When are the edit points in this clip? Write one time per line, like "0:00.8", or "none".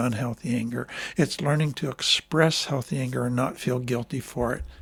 none